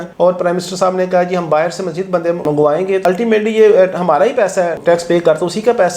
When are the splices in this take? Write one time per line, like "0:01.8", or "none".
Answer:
0:03.0